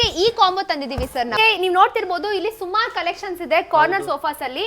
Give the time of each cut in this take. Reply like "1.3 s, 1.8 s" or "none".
1.4 s

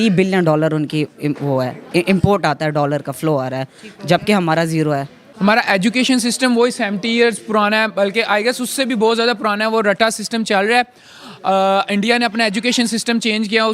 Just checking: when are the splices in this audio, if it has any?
5.2 s

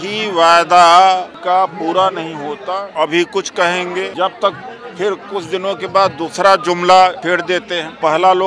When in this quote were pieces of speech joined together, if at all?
1.3 s, 2.9 s, 4.1 s, 7.4 s

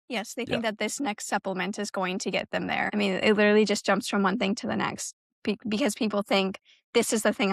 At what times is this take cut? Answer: 2.9 s

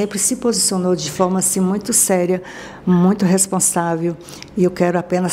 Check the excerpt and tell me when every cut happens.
none

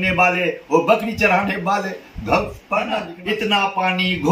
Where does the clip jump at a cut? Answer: 3.1 s

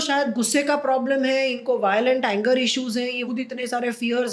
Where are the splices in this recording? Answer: 3.2 s

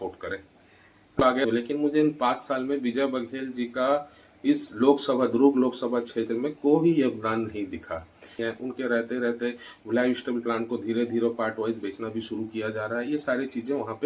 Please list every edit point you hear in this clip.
1.5 s, 8.4 s

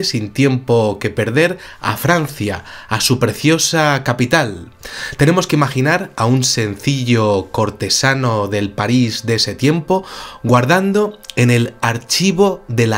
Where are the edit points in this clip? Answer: 1.7 s

